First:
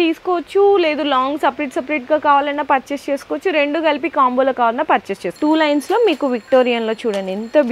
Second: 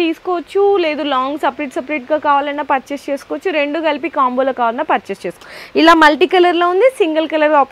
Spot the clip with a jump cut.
first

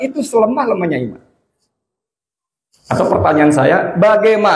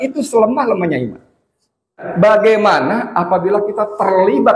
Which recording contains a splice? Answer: second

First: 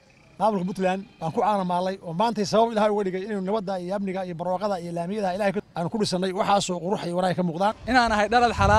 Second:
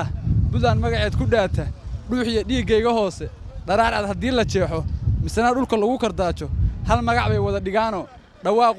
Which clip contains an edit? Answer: first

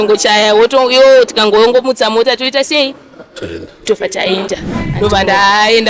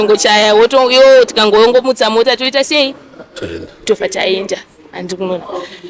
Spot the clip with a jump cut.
first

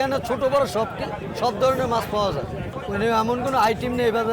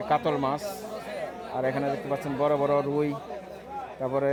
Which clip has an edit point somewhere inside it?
first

